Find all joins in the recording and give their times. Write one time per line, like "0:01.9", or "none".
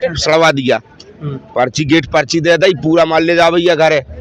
none